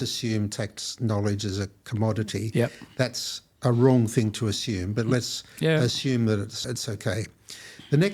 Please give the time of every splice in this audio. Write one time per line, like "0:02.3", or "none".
0:06.7